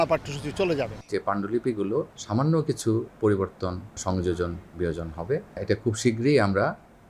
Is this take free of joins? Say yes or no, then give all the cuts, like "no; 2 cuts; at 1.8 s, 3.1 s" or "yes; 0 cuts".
no; 4 cuts; at 1.0 s, 2.2 s, 4.0 s, 5.6 s